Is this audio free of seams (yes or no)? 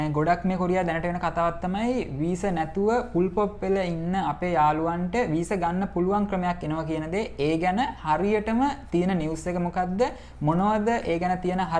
yes